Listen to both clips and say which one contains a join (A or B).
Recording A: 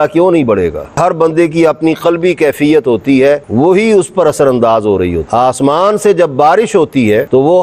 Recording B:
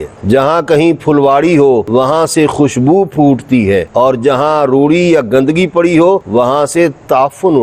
A